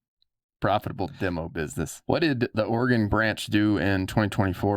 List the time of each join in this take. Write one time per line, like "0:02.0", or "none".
0:02.0
0:02.7